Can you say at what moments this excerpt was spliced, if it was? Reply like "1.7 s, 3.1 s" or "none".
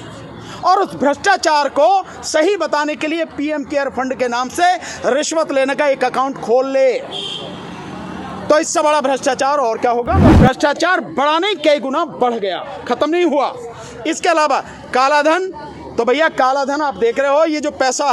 10.2 s

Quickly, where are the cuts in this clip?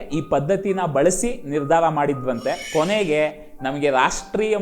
2.6 s

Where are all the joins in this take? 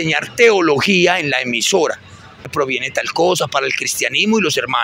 2.5 s

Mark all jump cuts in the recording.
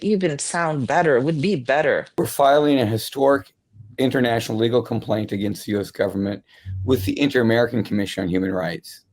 2.1 s

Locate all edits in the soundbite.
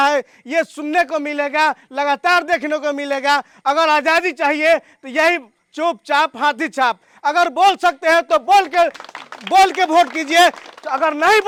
none

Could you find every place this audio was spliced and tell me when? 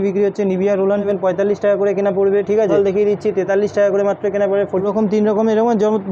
1.1 s, 2.7 s, 4.9 s

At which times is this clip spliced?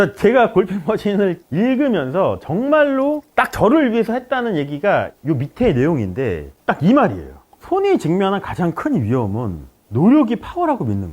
6.5 s

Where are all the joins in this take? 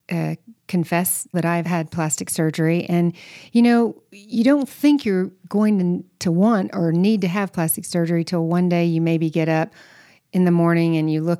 1.6 s

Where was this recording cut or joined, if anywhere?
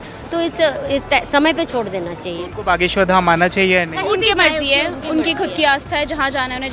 none

